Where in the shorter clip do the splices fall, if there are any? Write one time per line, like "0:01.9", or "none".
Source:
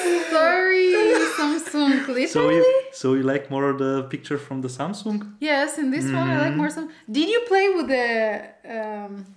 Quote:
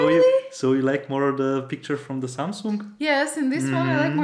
none